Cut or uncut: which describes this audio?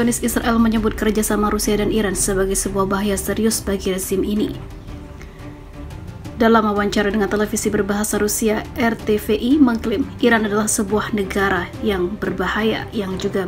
cut